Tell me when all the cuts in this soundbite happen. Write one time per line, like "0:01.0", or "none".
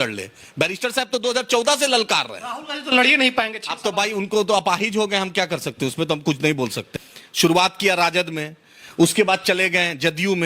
0:06.8

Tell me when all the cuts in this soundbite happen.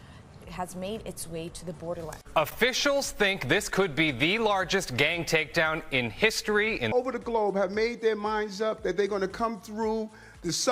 0:02.2
0:06.9

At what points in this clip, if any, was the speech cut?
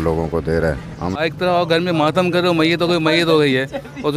0:01.1

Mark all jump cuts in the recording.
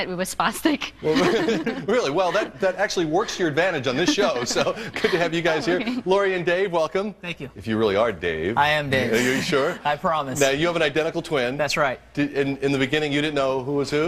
none

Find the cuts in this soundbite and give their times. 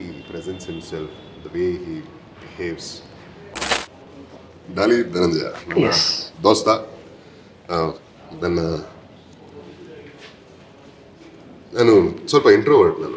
0:03.5

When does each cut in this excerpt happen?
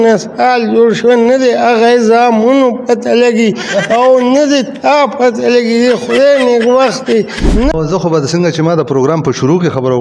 0:07.7

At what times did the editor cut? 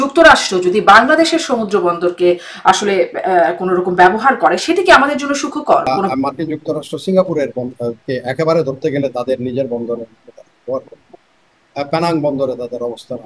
0:06.0

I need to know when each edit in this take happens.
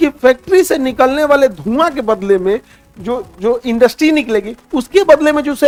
none

